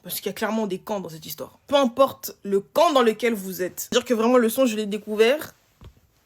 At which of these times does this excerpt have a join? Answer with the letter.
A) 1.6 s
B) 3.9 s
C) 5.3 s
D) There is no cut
B